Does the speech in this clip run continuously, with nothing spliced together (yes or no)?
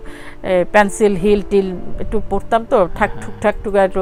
yes